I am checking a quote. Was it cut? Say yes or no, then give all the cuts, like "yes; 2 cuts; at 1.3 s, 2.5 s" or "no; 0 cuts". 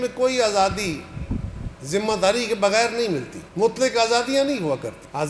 no; 0 cuts